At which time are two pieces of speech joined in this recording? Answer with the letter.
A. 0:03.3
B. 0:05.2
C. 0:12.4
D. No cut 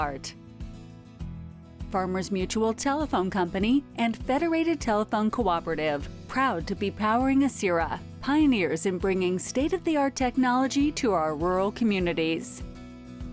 C